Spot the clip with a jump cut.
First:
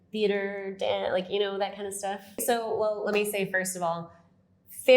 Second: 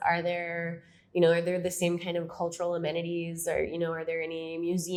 first; 1 cut; at 2.3 s

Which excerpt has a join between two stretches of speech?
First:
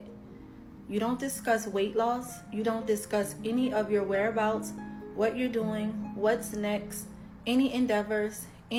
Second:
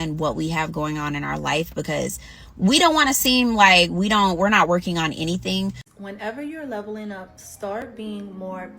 second; 1 cut; at 5.9 s

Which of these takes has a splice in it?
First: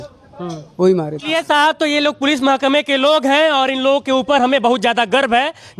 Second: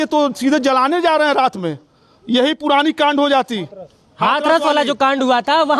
first; 1 cut; at 1.3 s

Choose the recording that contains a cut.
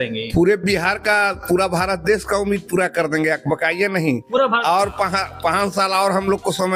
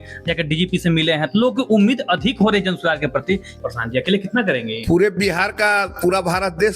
second; 1 cut; at 3.6 s

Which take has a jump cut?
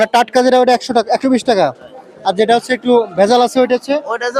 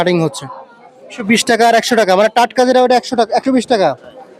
second; 1 cut; at 1.2 s

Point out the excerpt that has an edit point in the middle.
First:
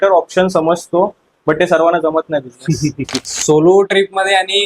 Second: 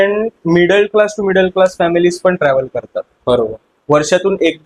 first; 1 cut; at 3.3 s

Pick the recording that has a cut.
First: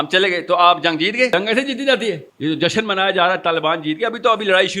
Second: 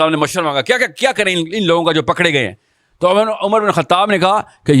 first; 2 cuts; at 1.3 s, 2.3 s

